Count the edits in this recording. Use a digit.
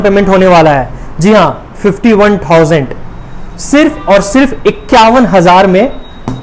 0